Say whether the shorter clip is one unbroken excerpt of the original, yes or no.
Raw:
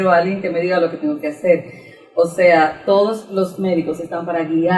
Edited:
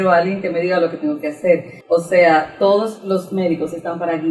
no